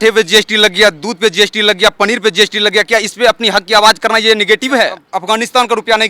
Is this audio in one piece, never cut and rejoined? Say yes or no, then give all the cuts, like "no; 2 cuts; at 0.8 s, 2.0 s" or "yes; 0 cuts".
no; 1 cut; at 5.1 s